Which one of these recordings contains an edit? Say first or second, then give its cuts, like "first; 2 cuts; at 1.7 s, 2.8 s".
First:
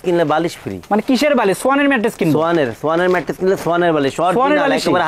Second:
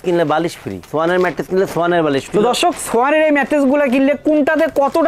second; 2 cuts; at 0.8 s, 2.2 s